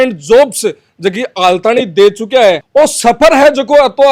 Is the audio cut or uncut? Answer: uncut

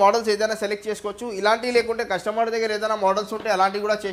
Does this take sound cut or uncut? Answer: uncut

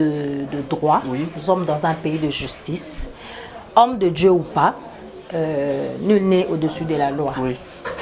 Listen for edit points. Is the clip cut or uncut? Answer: uncut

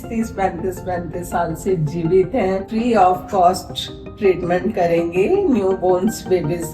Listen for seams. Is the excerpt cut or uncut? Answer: cut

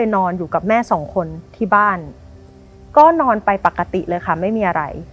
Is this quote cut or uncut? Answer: uncut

